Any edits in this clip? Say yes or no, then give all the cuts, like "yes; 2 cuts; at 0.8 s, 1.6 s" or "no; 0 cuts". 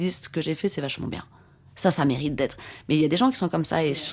no; 0 cuts